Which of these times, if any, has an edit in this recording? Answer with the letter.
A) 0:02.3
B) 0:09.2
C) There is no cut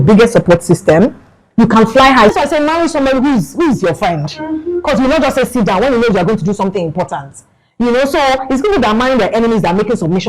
A